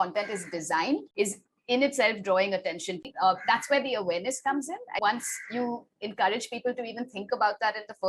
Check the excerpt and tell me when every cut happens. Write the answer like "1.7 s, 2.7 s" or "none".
1.1 s, 3.1 s, 5.0 s